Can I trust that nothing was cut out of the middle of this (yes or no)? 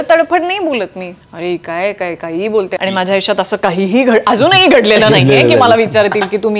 no